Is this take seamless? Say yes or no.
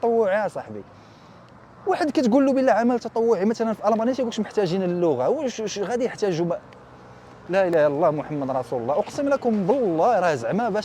yes